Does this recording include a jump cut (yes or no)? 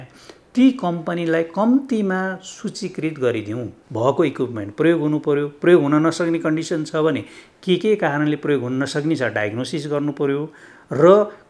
yes